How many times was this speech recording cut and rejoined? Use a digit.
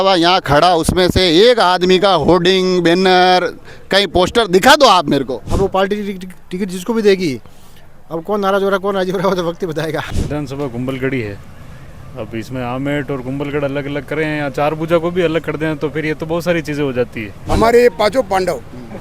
3